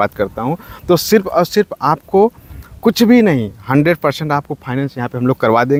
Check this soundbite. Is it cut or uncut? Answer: uncut